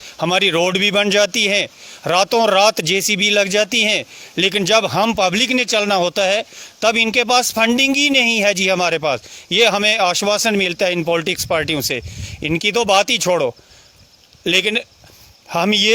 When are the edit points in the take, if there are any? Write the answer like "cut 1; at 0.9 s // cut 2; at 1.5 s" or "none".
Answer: none